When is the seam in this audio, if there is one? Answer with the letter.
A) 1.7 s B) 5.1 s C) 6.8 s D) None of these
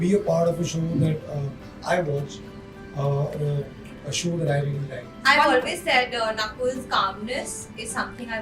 B